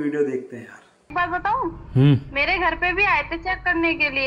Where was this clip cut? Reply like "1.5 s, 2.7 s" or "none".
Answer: 1.1 s